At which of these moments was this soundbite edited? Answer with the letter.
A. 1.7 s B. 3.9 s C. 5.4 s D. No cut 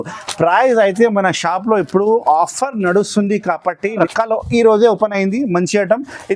B